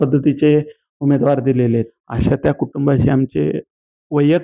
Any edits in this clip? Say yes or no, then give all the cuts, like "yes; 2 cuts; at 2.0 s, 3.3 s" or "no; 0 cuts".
yes; 1 cut; at 2.0 s